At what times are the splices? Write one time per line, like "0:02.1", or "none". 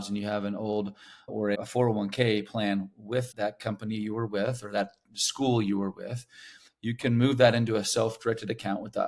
0:01.3
0:03.3